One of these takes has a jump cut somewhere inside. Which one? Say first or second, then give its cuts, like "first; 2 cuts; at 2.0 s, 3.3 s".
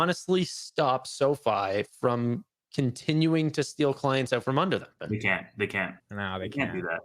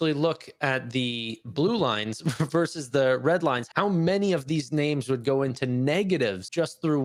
first; 1 cut; at 5.0 s